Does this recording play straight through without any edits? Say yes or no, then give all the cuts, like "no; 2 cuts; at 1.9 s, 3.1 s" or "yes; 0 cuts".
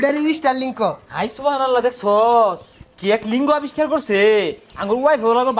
yes; 0 cuts